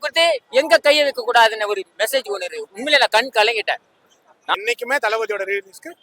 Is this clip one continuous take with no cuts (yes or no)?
no